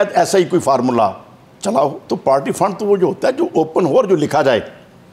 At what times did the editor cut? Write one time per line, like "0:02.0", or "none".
0:02.0

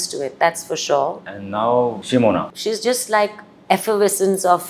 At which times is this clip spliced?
0:01.2
0:02.5

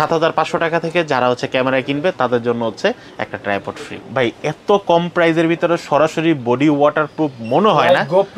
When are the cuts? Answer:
0:04.0

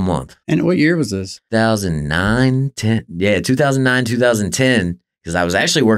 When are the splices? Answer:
0:01.4

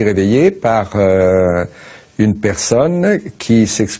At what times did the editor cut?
none

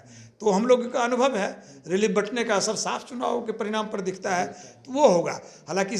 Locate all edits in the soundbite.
none

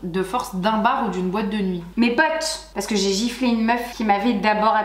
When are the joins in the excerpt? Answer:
0:02.7

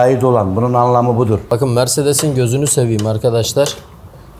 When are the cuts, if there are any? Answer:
0:01.5

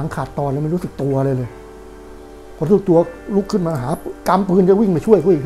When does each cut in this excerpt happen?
none

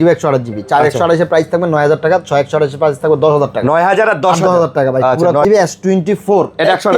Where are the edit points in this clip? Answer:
0:05.4

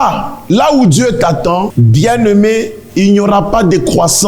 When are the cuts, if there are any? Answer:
0:01.7

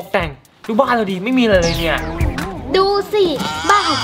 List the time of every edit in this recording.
0:02.5

